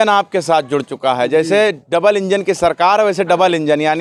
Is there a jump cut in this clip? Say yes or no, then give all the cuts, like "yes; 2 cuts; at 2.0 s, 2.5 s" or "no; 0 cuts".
no; 0 cuts